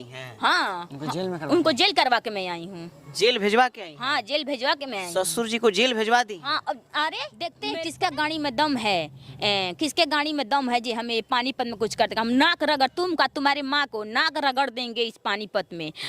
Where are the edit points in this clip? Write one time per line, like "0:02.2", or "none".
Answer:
0:07.6